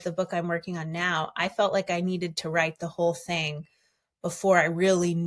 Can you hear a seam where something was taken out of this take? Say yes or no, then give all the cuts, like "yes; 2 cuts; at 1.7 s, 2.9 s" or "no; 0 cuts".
no; 0 cuts